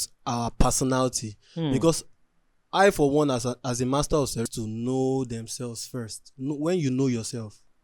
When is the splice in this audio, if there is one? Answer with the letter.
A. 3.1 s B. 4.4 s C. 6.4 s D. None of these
B